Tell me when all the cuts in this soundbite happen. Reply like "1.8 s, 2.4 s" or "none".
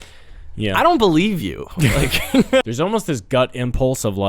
2.6 s